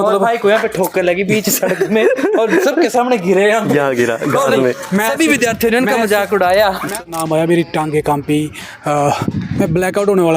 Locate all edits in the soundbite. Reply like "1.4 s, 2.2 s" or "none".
7.1 s